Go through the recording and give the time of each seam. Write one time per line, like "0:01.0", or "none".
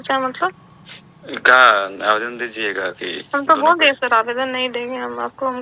none